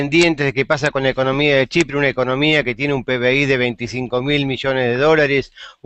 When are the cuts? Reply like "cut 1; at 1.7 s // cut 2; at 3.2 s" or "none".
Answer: none